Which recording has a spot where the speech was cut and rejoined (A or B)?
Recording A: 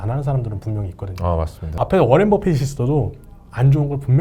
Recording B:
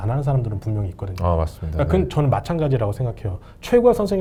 A